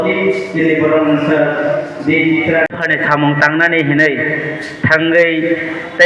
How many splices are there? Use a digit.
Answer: 1